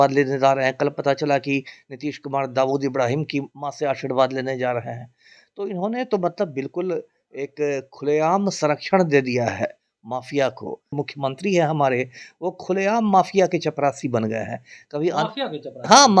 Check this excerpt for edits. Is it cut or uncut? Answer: cut